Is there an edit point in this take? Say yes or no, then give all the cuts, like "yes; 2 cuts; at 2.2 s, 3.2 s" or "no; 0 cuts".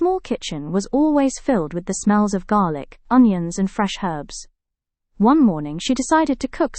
no; 0 cuts